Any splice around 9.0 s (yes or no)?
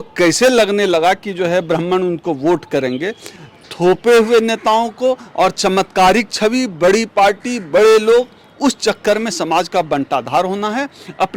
no